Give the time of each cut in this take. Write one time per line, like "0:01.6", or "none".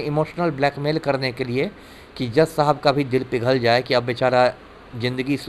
none